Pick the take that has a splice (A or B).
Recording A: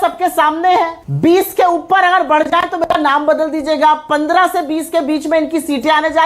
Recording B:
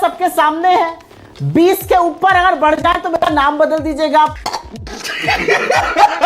A